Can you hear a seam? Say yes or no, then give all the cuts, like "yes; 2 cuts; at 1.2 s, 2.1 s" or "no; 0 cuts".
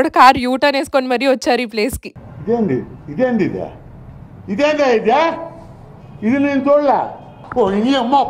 no; 0 cuts